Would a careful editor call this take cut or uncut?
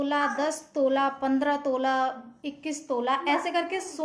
uncut